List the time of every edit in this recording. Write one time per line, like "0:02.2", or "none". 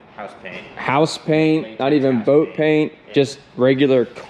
0:03.0